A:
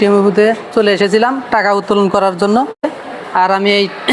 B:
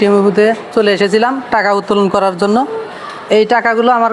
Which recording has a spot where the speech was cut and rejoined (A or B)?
A